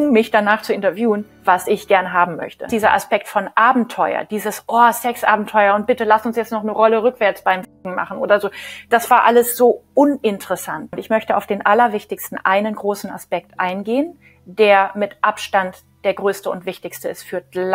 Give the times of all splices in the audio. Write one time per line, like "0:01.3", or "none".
0:02.7
0:10.9